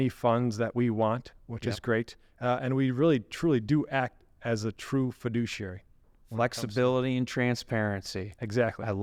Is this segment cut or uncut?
uncut